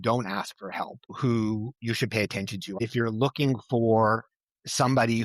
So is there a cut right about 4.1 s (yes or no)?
no